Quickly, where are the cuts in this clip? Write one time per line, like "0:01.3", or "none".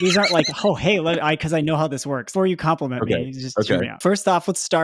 0:02.3
0:04.0